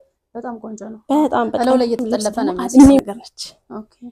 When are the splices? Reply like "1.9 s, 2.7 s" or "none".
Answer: 3.0 s